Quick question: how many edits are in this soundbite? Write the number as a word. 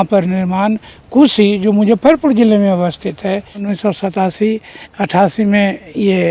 one